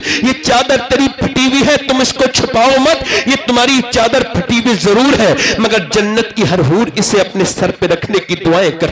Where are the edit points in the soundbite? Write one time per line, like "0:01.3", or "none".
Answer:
none